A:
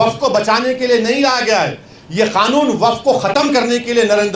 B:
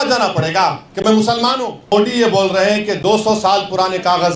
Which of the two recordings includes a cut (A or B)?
B